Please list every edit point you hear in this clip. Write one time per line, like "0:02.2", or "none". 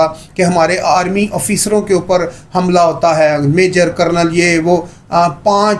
none